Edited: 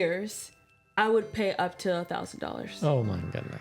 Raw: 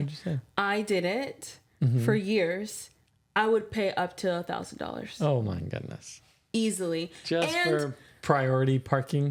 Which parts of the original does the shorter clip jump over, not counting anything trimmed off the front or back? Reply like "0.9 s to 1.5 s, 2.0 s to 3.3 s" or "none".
none